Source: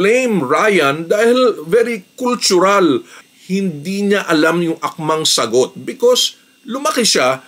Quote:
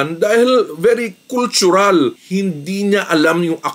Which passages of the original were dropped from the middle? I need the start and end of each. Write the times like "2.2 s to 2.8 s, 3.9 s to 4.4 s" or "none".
3.1 s to 3.4 s